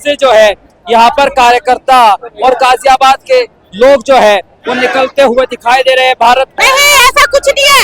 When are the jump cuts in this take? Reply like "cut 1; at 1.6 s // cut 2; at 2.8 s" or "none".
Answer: cut 1; at 6.5 s